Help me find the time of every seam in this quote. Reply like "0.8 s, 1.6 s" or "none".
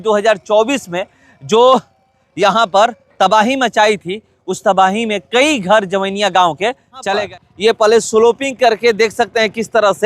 7.3 s